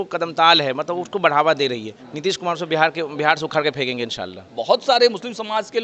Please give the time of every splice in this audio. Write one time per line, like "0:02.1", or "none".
0:02.0
0:04.5